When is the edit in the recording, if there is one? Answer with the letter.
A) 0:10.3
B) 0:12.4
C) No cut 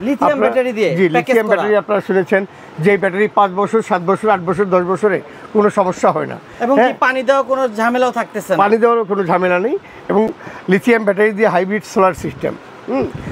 C